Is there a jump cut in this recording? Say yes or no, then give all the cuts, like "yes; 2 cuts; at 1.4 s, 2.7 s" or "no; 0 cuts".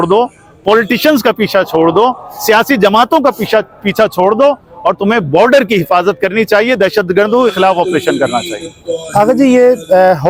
no; 0 cuts